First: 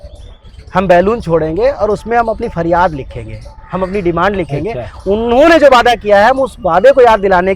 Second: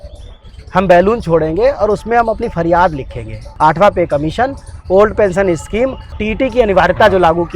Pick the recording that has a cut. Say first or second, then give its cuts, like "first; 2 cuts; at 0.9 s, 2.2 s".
second; 2 cuts; at 3.4 s, 6.1 s